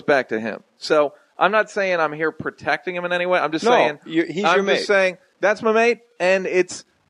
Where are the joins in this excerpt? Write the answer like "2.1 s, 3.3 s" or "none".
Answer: 5.3 s